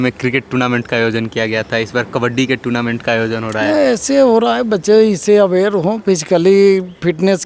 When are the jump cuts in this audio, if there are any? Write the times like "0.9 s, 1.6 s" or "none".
none